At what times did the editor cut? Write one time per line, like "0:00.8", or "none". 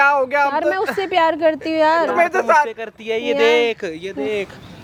none